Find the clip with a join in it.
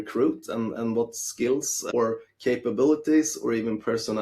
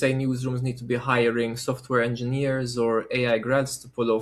first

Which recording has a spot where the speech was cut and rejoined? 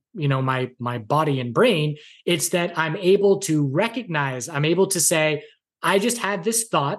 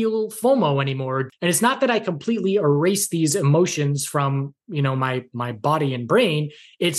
second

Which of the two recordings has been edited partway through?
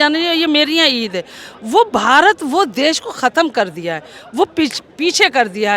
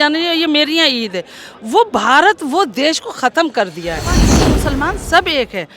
second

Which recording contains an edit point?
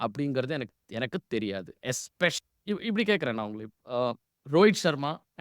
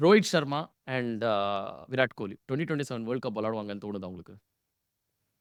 first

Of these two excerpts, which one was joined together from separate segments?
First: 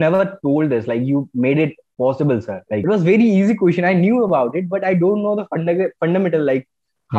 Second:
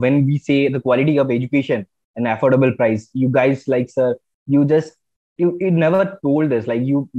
first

